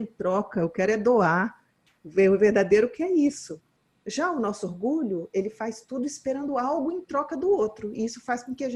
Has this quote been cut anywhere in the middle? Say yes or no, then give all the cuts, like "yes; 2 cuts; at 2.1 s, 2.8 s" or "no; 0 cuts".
no; 0 cuts